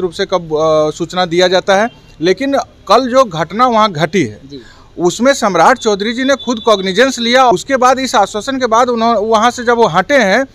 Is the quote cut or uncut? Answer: cut